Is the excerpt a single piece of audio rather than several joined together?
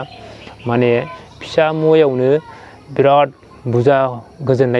no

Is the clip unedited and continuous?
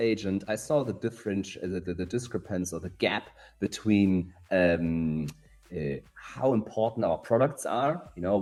yes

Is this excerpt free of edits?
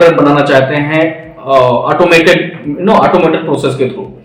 yes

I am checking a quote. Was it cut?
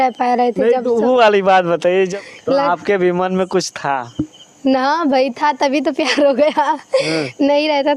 yes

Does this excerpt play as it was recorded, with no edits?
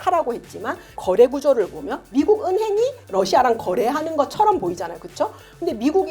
no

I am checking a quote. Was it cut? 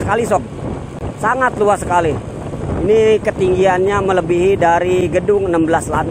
no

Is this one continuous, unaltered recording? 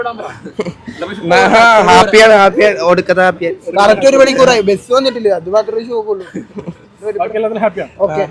yes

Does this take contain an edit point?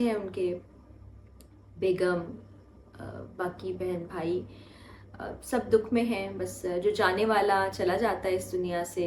no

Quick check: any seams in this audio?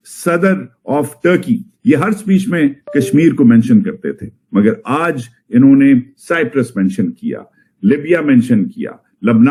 no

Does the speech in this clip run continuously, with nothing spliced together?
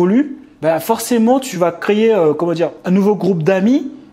no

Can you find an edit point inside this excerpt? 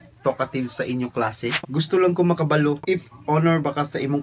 yes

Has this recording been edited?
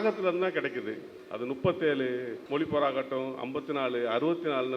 yes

